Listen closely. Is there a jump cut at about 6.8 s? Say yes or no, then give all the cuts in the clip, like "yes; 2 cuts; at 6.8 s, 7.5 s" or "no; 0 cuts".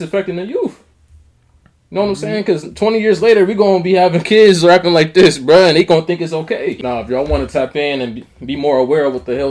yes; 1 cut; at 6.8 s